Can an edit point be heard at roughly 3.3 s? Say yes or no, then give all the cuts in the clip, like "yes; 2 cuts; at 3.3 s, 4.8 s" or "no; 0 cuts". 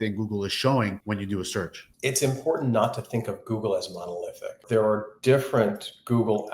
no; 3 cuts; at 1.0 s, 1.8 s, 4.6 s